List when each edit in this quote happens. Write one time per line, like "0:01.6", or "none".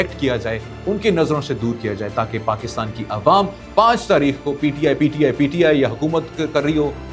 none